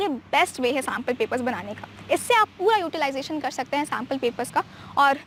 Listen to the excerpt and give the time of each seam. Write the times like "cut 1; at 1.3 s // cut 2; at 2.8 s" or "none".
none